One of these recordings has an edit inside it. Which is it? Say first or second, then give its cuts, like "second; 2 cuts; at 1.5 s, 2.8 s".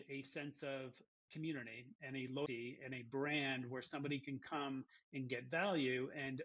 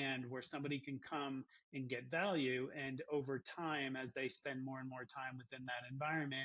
first; 2 cuts; at 1.2 s, 2.5 s